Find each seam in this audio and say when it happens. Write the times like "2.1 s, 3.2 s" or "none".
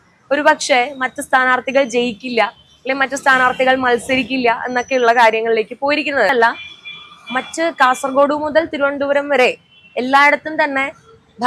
6.3 s